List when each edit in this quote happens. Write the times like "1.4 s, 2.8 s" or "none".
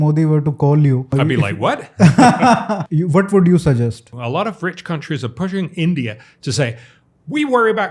1.1 s, 2.8 s, 4.2 s

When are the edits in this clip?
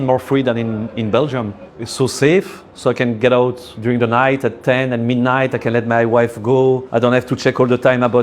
1.6 s, 3.7 s, 6.8 s

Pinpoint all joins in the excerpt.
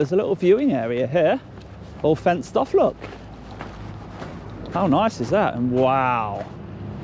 none

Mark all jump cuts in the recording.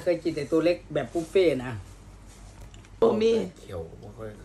3.0 s

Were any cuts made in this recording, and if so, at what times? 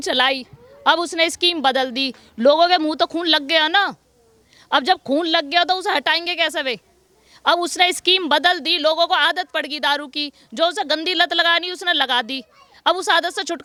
none

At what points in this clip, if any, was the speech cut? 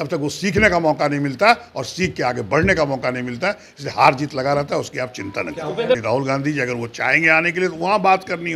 6.0 s

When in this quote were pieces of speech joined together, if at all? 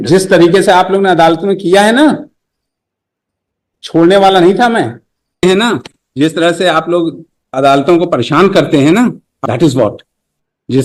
5.4 s, 9.3 s

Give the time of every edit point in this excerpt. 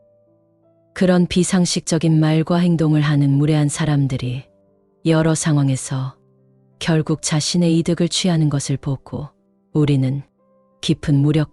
none

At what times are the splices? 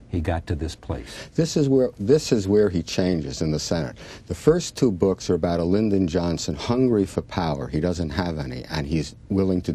3.1 s

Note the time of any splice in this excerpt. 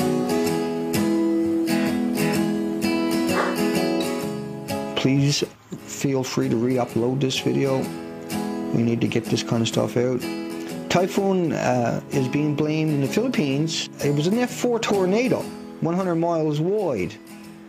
15.9 s

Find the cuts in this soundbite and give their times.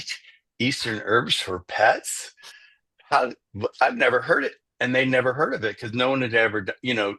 none

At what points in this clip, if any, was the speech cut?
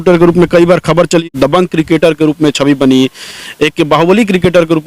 1.2 s

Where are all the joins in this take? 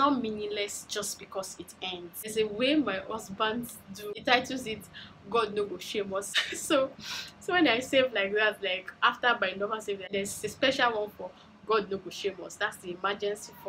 2.3 s, 4.2 s, 6.3 s, 10.1 s

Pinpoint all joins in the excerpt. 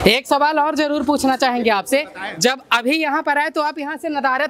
none

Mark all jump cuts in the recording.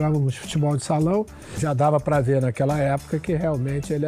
1.5 s

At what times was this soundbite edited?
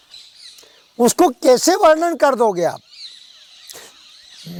none

